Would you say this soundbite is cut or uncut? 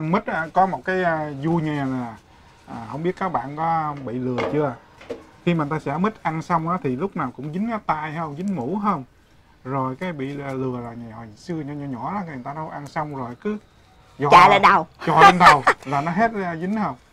uncut